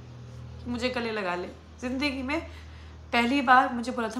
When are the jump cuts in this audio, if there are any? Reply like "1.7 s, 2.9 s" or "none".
none